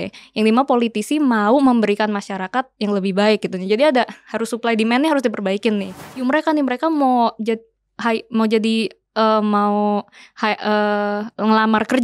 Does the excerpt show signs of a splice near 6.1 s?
yes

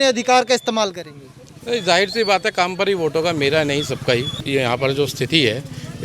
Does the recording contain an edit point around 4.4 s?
yes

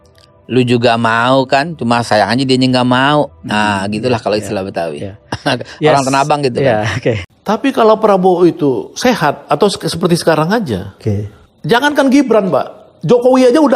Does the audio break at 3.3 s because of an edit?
no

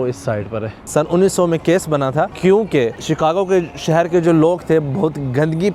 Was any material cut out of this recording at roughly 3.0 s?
yes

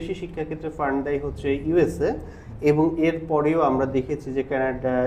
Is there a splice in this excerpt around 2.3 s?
no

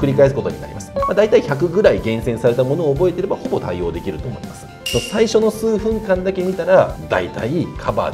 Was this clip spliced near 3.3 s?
no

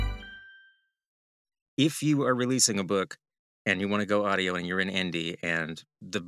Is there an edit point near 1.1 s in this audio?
yes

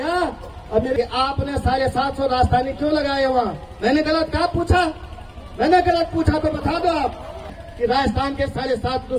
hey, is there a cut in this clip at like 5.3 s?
no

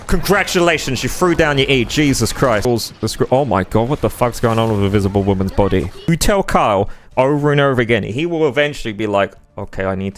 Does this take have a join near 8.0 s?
no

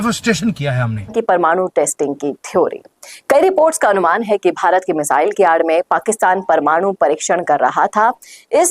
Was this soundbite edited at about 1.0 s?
yes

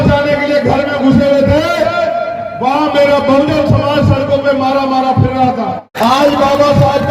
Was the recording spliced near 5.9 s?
yes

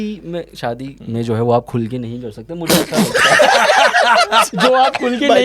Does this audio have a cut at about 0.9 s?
yes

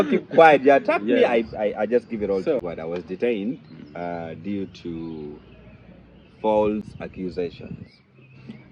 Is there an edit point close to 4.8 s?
no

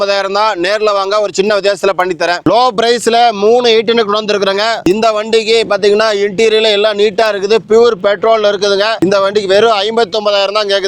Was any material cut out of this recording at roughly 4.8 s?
yes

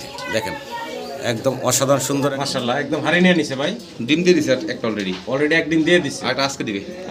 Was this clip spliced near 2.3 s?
yes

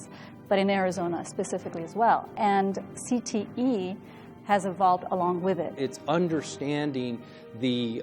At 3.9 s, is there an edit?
no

